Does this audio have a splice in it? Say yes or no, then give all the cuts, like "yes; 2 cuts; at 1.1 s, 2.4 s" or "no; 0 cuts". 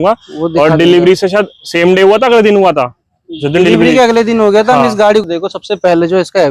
yes; 1 cut; at 5.2 s